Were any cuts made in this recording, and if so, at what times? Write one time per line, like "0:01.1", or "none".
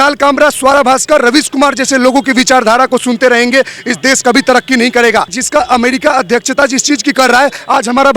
0:05.4